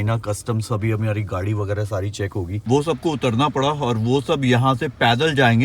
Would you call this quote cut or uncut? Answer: cut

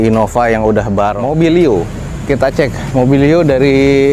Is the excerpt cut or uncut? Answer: cut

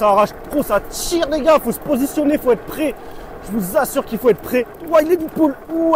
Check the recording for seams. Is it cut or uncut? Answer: cut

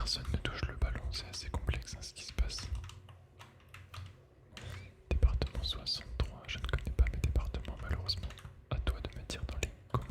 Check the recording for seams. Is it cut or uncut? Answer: cut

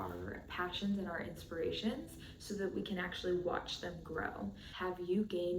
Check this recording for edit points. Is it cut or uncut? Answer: cut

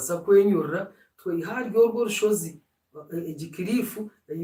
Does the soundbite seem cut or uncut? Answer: uncut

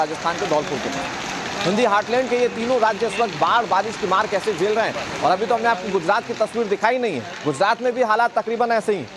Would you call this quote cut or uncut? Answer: cut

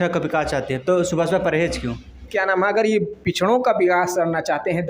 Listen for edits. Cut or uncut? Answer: cut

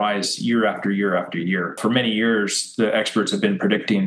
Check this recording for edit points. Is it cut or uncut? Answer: uncut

